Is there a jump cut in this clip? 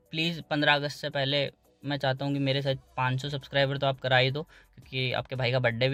no; 0 cuts

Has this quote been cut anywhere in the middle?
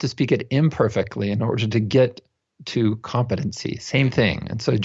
no; 0 cuts

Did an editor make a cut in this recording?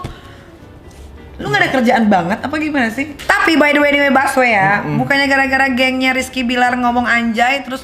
yes; 1 cut; at 3.1 s

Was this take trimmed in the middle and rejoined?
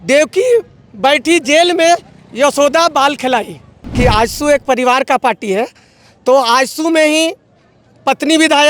yes; 1 cut; at 3.8 s

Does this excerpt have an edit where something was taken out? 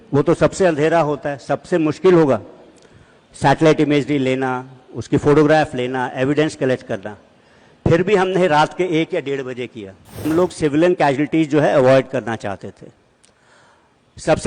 yes; 1 cut; at 10.2 s

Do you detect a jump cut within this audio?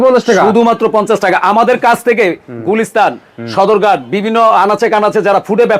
no; 0 cuts

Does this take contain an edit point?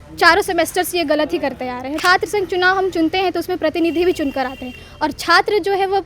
yes; 1 cut; at 2.0 s

